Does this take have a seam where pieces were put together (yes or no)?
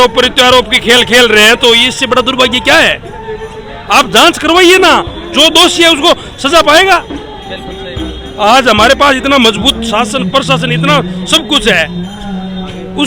no